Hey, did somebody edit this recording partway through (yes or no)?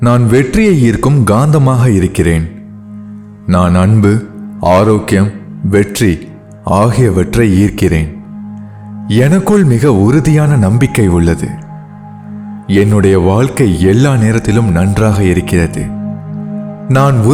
no